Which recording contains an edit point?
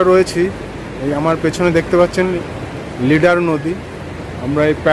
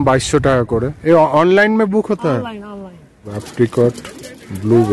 second; 2 cuts; at 0.9 s, 3.4 s

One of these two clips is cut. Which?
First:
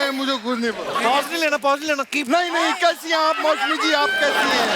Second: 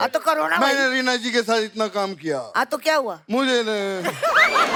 first; 1 cut; at 1.0 s

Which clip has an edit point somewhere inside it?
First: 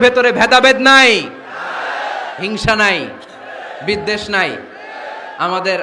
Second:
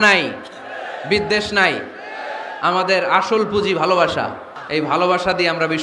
second; 1 cut; at 4.5 s

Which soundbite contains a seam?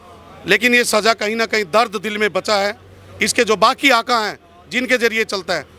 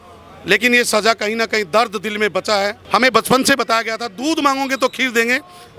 second; 1 cut; at 2.8 s

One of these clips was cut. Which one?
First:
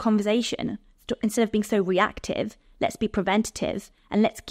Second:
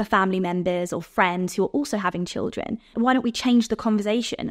second; 1 cut; at 2.8 s

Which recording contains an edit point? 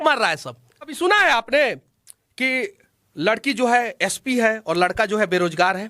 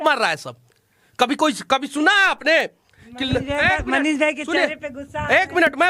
first; 1 cut; at 0.9 s

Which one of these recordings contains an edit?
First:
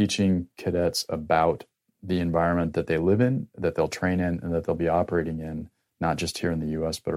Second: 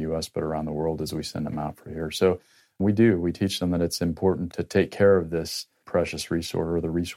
second; 3 cuts; at 2.8 s, 4.5 s, 5.8 s

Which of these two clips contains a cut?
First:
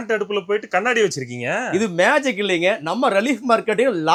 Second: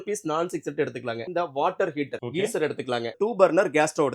second; 3 cuts; at 1.3 s, 2.2 s, 3.1 s

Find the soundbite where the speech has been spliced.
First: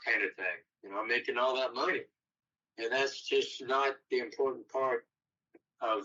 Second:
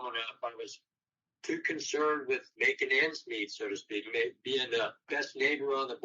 second; 2 cuts; at 2.5 s, 5.0 s

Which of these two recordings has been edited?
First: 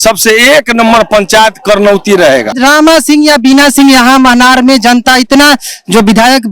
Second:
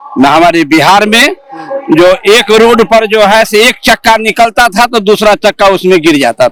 first; 1 cut; at 2.6 s

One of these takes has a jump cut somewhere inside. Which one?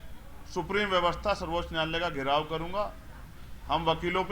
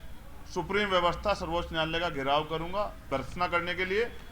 second; 1 cut; at 3.0 s

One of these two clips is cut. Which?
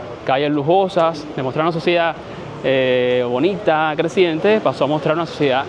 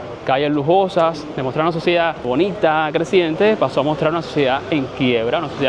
second; 1 cut; at 2.2 s

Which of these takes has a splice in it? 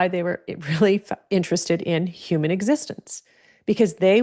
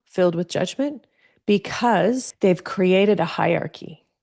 second; 1 cut; at 2.3 s

